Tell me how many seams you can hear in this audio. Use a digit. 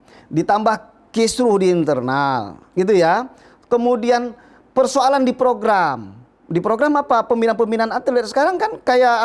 0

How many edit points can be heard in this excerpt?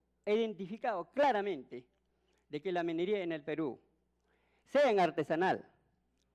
1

